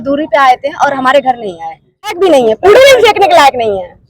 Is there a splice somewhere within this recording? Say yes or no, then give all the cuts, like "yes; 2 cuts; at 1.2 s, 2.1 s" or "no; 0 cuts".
yes; 1 cut; at 2.2 s